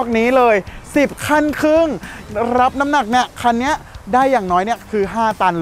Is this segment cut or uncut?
uncut